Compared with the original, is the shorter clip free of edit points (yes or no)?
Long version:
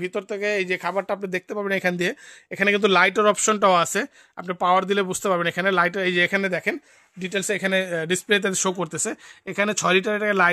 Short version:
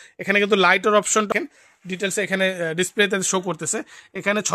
no